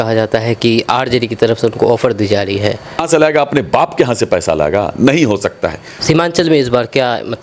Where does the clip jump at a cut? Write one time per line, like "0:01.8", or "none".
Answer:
0:03.0
0:05.9